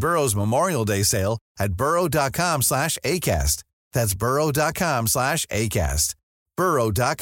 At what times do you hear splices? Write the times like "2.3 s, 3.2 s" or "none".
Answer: none